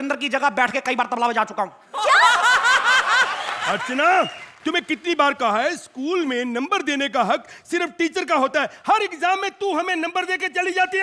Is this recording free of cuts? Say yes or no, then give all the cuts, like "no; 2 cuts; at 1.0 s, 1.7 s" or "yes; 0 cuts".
no; 1 cut; at 3.5 s